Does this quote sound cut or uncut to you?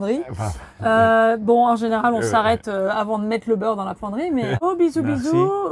cut